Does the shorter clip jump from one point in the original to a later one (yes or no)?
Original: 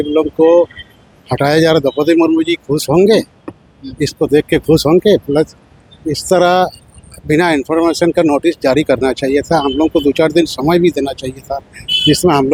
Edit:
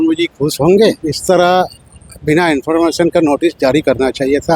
yes